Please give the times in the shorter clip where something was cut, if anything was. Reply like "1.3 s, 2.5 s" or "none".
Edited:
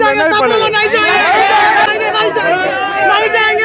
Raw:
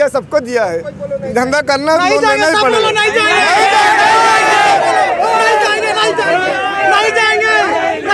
1.9 s